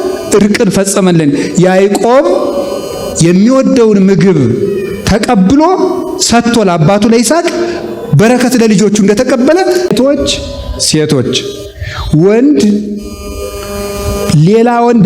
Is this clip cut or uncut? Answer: cut